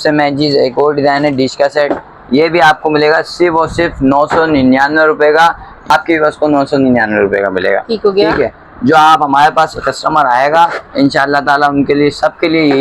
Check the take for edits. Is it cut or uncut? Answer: cut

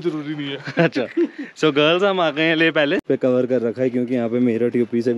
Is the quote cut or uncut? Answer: cut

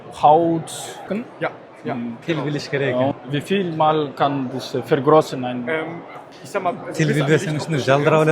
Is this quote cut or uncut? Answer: cut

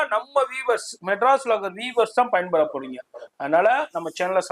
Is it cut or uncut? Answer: uncut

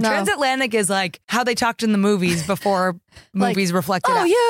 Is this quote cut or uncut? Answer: cut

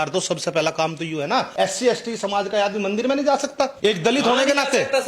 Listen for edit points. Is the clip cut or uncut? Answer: cut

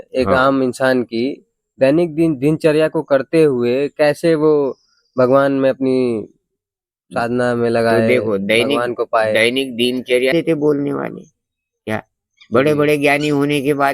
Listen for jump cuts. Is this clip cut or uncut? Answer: cut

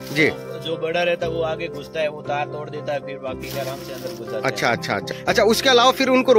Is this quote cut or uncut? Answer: cut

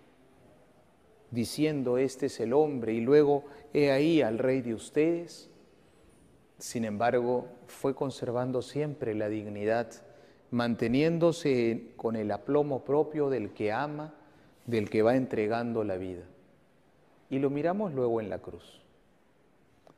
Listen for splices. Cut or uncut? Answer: cut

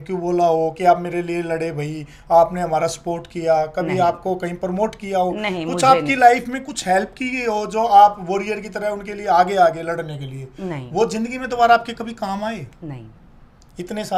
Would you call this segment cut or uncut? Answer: uncut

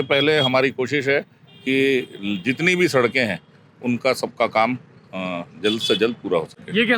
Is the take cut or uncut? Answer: uncut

